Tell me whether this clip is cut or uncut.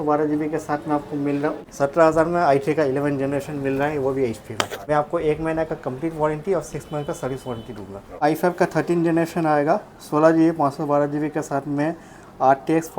cut